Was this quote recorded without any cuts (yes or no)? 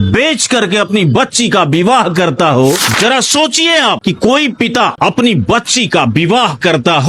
no